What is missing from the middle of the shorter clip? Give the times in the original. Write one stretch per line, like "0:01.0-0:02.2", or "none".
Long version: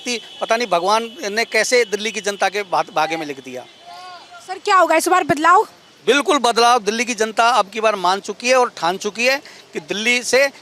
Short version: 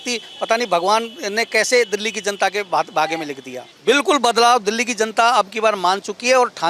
0:03.6-0:05.8